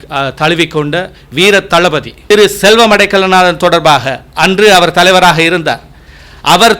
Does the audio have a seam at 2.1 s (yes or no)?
yes